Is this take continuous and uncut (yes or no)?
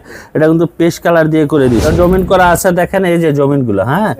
no